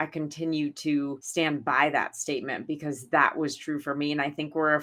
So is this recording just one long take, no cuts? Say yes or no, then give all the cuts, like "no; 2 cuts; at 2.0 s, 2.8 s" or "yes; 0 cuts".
no; 1 cut; at 1.2 s